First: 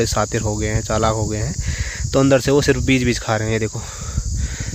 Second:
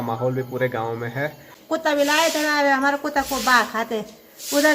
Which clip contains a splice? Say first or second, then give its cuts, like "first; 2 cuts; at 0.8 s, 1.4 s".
second; 1 cut; at 1.5 s